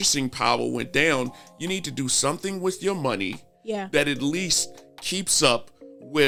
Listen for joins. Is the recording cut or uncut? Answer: uncut